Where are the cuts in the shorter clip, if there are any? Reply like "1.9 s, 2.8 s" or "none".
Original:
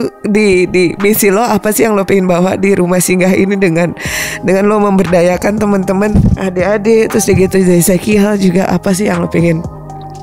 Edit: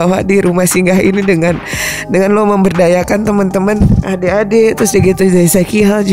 none

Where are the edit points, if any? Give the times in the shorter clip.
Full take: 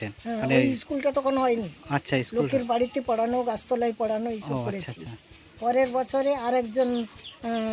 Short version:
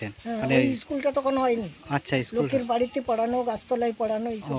none

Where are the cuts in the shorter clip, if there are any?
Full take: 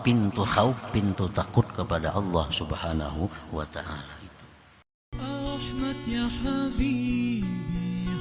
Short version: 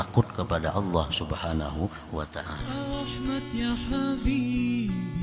2.6 s

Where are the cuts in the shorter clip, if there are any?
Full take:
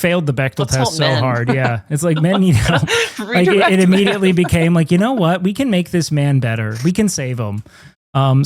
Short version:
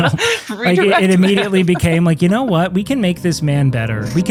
none

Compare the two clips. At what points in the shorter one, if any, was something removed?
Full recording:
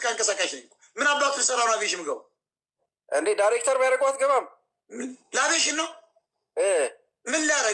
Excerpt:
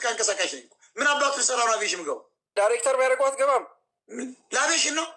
2.5 s

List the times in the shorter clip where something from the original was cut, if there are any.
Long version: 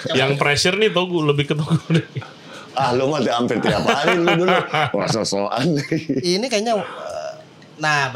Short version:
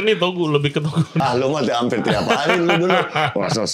1.2 s

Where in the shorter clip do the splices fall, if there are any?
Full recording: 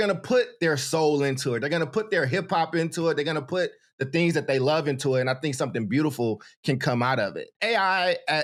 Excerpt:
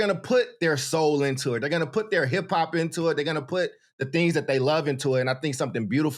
none

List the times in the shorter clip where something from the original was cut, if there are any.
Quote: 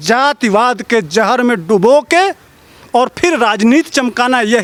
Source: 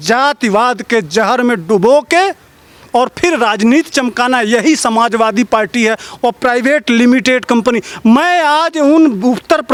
none

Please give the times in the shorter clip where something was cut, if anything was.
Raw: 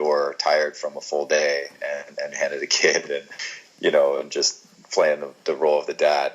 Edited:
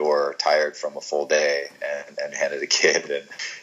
none

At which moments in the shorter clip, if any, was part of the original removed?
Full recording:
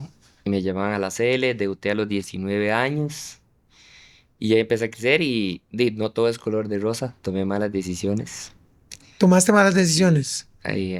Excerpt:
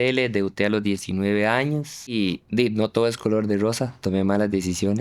2.1 s

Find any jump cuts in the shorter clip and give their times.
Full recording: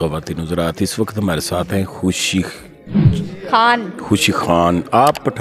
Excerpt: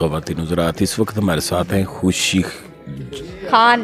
none

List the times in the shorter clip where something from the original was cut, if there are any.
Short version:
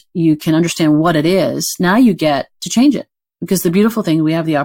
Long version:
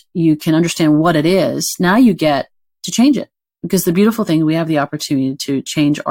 2.6 s

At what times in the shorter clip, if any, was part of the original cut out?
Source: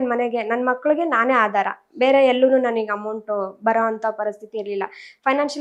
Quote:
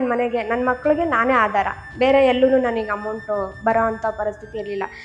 none

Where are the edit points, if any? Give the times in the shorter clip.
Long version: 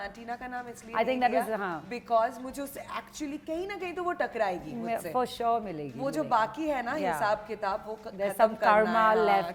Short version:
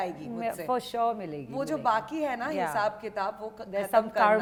none

